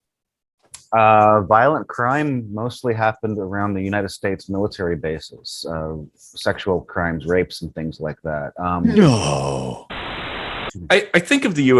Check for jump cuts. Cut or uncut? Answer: cut